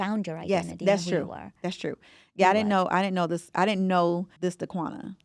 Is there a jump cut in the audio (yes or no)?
yes